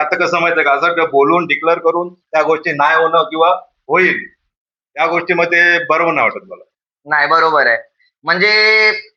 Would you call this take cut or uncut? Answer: uncut